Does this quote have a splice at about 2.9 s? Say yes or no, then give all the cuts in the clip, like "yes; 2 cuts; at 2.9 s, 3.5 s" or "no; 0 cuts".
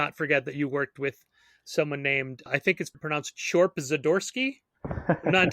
yes; 1 cut; at 2.9 s